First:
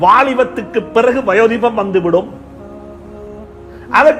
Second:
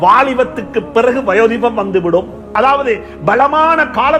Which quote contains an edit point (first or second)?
second